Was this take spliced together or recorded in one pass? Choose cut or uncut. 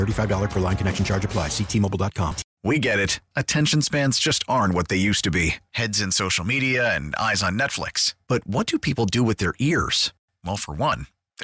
cut